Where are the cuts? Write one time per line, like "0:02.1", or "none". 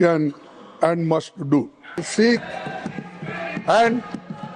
0:02.1